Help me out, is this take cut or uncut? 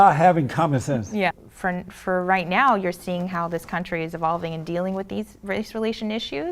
cut